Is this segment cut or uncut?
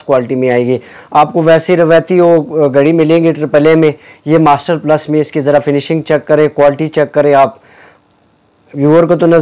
uncut